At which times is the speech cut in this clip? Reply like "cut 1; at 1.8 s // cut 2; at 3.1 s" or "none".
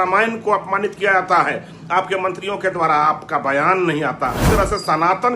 cut 1; at 4.4 s